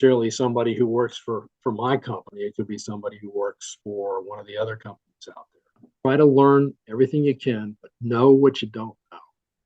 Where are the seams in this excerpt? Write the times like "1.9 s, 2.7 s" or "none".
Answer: 5.8 s